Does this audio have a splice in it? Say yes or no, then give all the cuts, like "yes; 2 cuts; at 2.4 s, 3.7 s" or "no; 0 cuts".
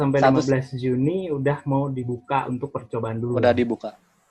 no; 0 cuts